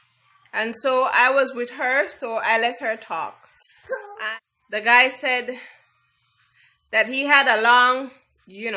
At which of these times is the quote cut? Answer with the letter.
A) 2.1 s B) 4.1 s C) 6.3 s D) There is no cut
B